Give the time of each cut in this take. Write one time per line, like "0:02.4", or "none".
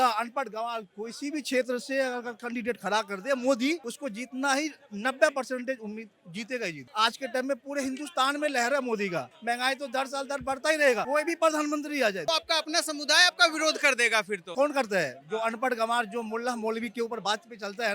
0:06.9
0:09.3
0:12.2